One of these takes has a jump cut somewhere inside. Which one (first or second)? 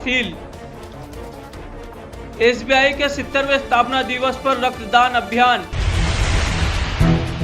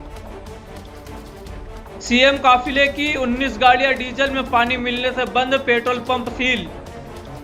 first